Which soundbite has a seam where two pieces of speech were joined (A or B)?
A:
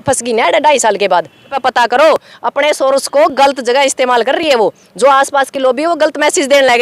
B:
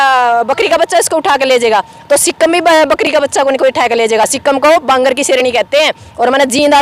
A